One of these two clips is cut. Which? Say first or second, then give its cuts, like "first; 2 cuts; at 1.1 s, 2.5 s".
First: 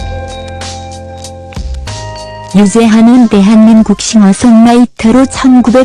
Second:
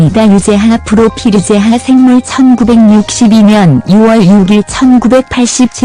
first; 1 cut; at 2.4 s